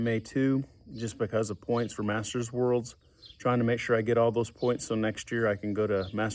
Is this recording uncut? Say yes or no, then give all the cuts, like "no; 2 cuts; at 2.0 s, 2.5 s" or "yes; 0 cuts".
yes; 0 cuts